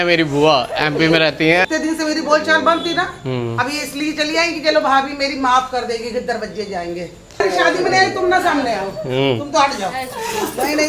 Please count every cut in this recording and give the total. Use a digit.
2